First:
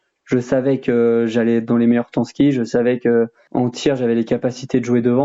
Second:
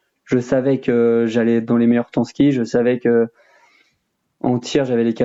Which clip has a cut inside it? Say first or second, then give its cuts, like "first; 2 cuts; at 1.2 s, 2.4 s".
first; 1 cut; at 3.4 s